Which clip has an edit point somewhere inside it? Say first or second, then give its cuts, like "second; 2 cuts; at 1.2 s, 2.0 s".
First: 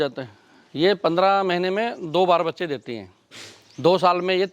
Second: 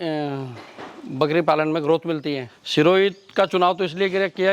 second; 1 cut; at 2.5 s